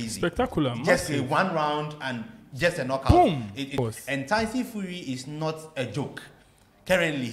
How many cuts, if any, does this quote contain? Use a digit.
1